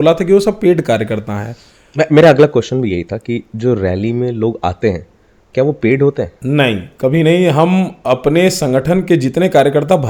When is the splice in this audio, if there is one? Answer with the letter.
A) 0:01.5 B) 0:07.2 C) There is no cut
C